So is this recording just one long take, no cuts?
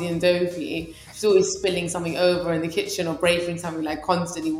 yes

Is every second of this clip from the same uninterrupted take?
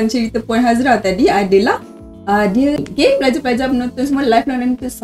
no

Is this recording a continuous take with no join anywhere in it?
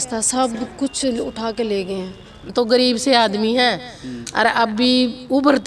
no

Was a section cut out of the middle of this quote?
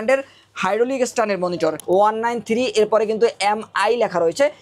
yes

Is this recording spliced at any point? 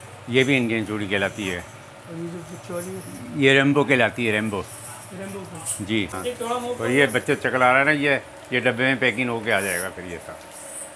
yes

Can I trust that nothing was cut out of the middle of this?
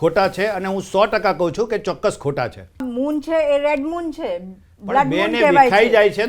no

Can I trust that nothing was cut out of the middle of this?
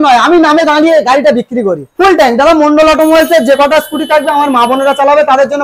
no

